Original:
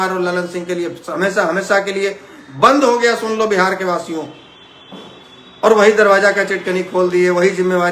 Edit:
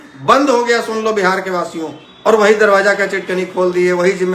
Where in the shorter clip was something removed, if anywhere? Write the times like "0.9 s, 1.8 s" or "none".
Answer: 2.0 s